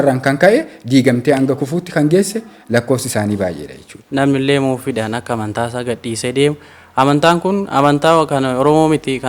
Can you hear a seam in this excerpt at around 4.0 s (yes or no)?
yes